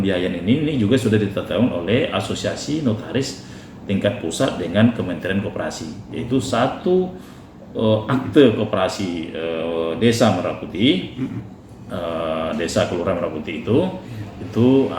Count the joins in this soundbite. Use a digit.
0